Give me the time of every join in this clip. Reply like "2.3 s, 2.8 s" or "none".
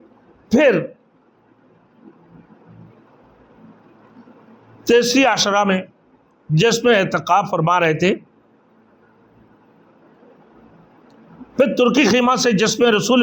none